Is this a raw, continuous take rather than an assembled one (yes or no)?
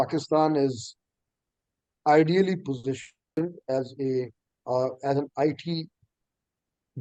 yes